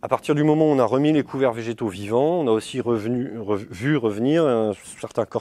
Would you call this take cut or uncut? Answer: uncut